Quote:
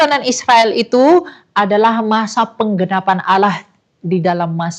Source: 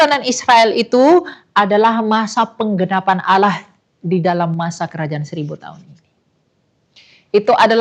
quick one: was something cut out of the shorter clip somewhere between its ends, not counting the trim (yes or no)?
no